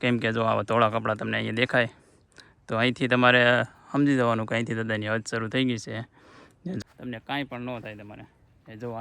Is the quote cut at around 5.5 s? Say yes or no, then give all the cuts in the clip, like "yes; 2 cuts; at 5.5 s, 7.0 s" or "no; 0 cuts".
no; 1 cut; at 6.8 s